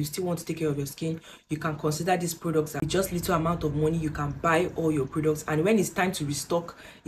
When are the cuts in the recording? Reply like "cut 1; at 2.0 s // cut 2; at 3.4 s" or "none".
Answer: cut 1; at 2.9 s